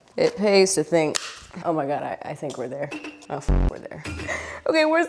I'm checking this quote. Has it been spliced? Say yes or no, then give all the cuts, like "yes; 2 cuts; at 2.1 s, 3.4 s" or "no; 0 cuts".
yes; 1 cut; at 1.5 s